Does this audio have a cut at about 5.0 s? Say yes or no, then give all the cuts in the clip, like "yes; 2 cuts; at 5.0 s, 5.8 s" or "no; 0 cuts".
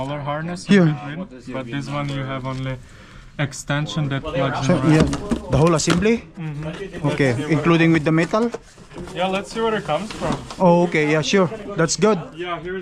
yes; 1 cut; at 5.0 s